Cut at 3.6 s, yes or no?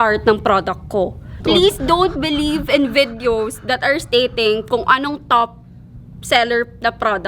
no